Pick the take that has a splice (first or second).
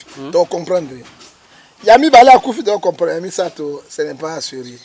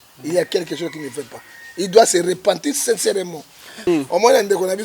second